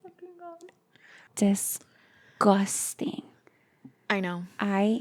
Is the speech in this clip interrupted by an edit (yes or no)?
yes